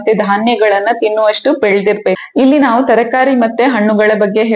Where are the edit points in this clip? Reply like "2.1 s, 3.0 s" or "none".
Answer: 2.2 s